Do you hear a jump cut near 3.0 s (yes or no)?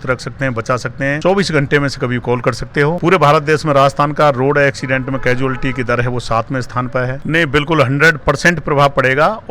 yes